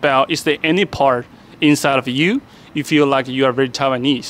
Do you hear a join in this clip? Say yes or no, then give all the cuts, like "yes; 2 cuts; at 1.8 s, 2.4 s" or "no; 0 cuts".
no; 0 cuts